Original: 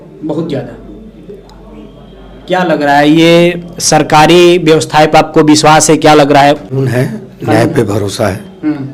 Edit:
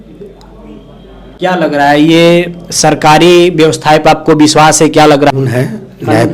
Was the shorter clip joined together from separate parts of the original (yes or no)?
yes